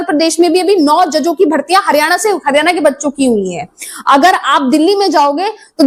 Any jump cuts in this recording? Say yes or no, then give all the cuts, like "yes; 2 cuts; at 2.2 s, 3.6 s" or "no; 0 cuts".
no; 0 cuts